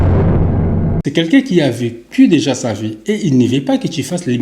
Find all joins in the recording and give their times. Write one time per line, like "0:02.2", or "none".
0:01.0